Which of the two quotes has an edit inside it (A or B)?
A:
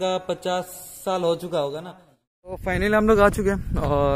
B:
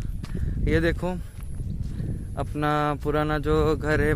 A